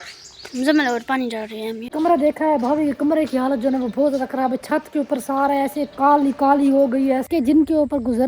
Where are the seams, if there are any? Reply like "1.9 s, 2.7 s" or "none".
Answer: 1.9 s, 7.3 s